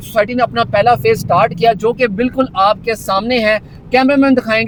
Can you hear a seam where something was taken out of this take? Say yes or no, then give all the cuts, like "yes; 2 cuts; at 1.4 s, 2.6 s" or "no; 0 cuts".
no; 0 cuts